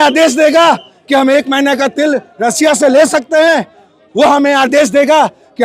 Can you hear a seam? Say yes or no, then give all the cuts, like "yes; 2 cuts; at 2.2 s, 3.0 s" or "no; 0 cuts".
no; 0 cuts